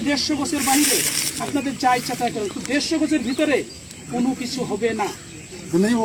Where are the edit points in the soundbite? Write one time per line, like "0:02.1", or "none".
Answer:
none

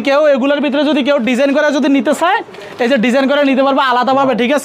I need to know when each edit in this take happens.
none

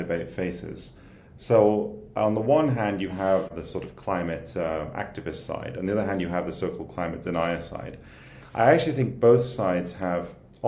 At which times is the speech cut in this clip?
0:03.6

